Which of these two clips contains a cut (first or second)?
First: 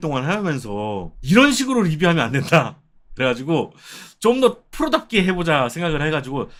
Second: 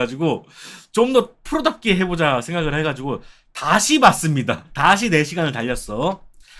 second